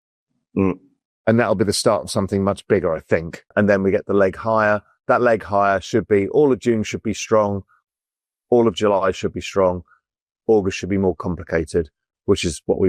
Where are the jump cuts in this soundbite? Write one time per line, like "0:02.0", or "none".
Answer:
0:03.5